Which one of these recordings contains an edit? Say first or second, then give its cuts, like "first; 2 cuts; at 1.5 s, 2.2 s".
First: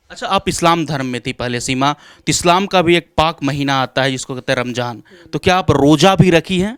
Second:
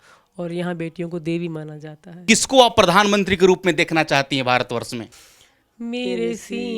second; 2 cuts; at 2.2 s, 5.2 s